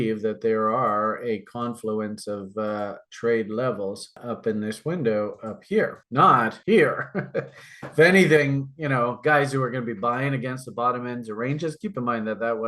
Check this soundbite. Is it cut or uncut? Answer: uncut